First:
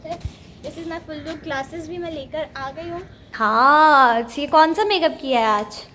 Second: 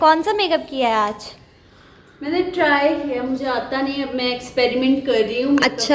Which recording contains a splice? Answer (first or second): first